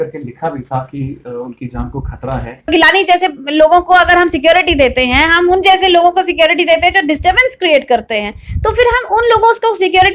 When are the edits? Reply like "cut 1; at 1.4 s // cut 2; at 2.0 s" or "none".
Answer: cut 1; at 2.7 s